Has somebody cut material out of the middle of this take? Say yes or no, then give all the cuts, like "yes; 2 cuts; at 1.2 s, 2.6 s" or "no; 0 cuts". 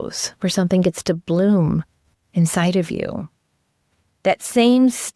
no; 0 cuts